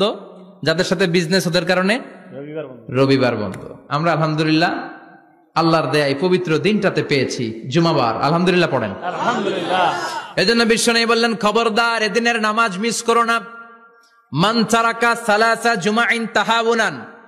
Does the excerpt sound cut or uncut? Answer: uncut